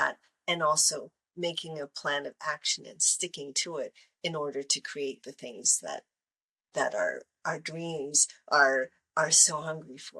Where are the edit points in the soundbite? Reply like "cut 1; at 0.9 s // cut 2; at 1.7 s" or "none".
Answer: none